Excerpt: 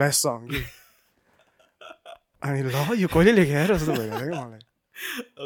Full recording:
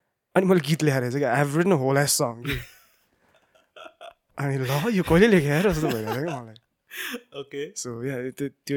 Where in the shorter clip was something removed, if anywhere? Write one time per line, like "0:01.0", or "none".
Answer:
none